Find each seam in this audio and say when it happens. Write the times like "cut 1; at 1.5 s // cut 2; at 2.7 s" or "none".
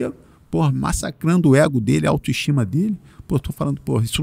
none